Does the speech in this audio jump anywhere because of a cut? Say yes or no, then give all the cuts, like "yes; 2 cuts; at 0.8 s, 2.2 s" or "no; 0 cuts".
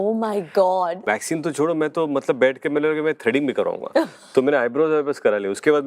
yes; 1 cut; at 1.0 s